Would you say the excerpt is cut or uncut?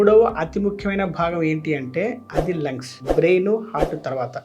uncut